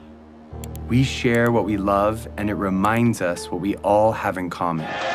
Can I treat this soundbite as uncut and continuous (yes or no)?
yes